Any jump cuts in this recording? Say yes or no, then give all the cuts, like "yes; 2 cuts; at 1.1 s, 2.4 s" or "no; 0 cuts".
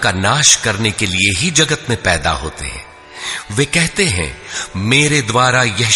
no; 0 cuts